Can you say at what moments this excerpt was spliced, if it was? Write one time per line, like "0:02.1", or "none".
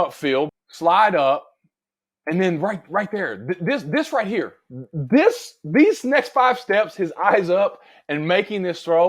none